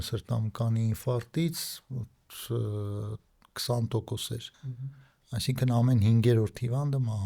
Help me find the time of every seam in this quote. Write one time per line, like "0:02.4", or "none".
0:04.8